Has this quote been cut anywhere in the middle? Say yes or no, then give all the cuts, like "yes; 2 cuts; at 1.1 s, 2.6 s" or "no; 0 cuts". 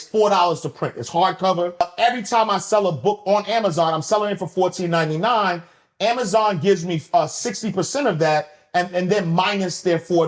yes; 1 cut; at 1.9 s